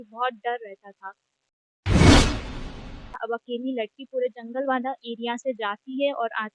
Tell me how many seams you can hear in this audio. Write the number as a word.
two